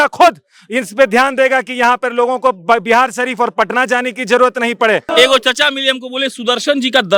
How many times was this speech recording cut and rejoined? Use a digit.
1